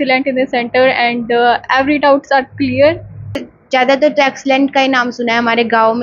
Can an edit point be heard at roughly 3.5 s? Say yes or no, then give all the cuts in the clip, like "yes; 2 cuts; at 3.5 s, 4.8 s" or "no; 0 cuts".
yes; 1 cut; at 3.5 s